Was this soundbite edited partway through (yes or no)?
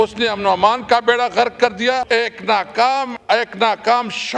yes